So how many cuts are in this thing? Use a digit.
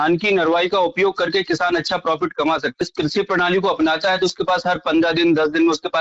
1